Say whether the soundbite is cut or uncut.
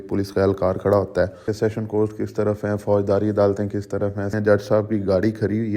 cut